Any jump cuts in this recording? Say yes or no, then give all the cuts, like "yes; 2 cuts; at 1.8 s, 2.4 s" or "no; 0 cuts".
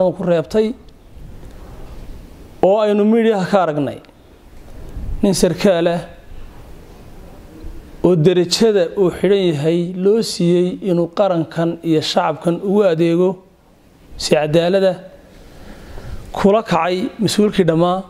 no; 0 cuts